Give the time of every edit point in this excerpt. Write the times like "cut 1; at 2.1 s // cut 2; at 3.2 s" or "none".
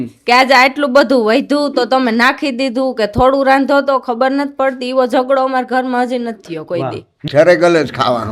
cut 1; at 7.3 s